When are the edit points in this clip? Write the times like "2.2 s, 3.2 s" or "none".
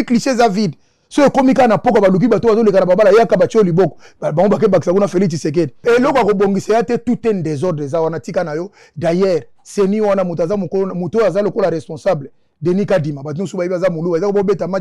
5.7 s